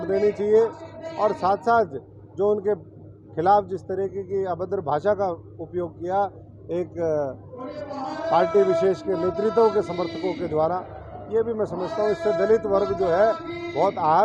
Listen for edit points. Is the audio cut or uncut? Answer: uncut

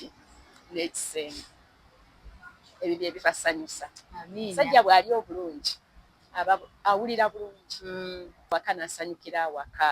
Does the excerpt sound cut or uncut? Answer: cut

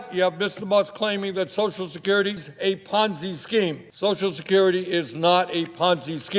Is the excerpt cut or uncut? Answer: cut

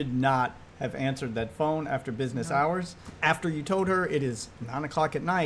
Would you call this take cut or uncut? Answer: cut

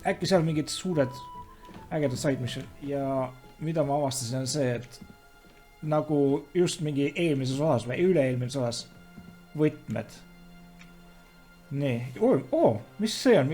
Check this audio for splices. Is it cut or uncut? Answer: cut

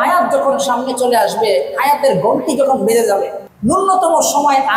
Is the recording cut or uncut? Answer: cut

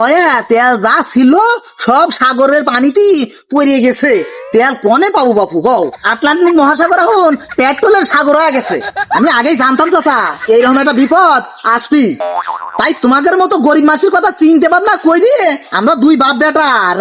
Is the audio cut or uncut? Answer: uncut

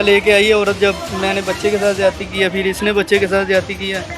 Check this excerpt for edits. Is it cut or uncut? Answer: cut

